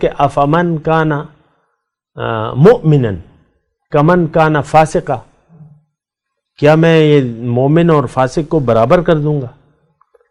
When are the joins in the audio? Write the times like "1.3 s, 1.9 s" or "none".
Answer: none